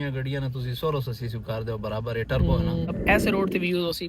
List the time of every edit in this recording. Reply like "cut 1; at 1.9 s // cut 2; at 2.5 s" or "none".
cut 1; at 2.9 s